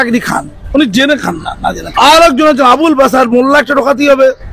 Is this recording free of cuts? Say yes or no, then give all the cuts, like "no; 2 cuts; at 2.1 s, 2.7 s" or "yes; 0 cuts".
no; 1 cut; at 1.8 s